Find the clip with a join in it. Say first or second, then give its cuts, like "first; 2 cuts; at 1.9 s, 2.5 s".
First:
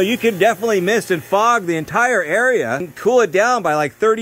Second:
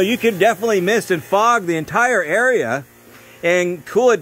first; 1 cut; at 2.9 s